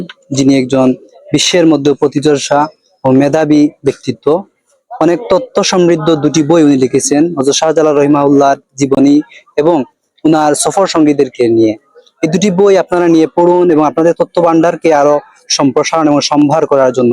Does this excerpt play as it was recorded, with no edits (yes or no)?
yes